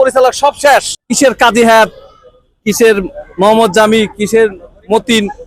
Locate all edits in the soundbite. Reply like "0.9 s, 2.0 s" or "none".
1.0 s